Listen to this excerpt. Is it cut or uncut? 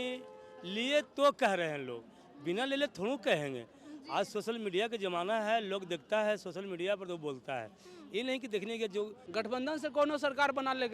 cut